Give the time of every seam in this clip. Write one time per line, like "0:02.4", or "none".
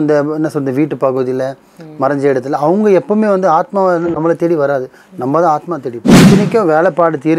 0:06.1